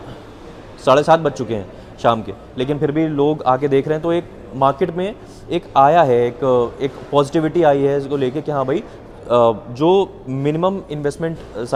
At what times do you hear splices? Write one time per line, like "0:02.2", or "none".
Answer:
none